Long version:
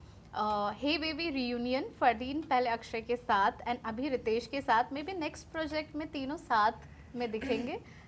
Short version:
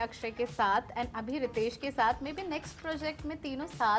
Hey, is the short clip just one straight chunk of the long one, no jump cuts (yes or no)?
yes